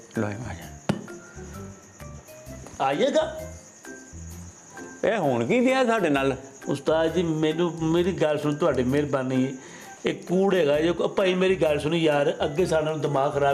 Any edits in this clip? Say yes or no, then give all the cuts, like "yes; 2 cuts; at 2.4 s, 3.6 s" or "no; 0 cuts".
no; 0 cuts